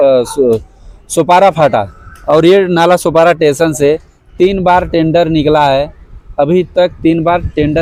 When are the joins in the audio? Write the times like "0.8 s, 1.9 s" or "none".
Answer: none